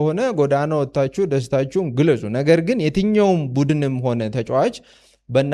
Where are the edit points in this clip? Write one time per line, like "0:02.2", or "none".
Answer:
none